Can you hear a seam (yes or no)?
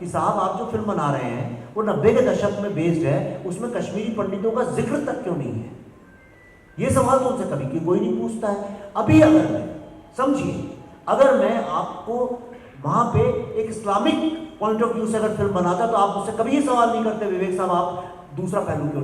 no